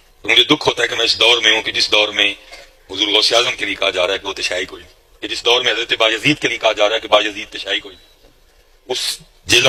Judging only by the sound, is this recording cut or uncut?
uncut